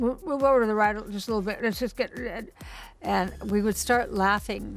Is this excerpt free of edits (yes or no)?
yes